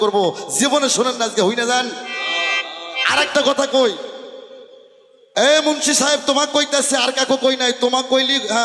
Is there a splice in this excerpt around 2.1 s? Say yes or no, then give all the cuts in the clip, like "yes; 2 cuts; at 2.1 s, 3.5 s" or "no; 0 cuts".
no; 0 cuts